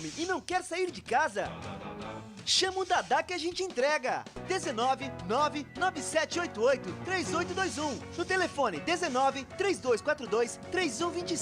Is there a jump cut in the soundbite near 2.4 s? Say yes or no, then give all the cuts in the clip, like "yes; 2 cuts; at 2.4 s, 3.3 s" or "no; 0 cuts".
no; 0 cuts